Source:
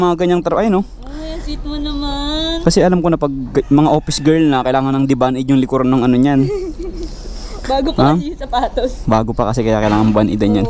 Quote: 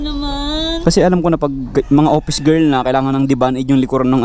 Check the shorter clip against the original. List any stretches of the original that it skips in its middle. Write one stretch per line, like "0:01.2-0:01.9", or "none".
none